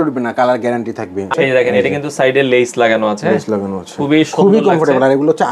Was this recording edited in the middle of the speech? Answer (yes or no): yes